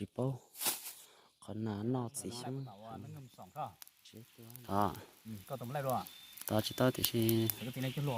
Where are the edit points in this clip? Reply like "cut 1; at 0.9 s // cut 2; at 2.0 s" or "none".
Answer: cut 1; at 2.8 s